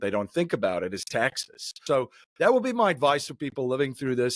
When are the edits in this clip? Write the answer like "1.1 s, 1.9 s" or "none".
1.8 s